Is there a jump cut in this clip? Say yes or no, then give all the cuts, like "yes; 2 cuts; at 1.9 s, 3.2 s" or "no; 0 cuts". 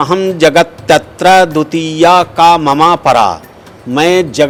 no; 0 cuts